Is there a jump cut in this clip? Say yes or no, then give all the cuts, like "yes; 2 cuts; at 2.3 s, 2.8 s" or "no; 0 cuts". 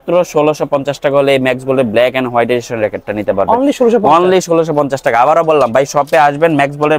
no; 0 cuts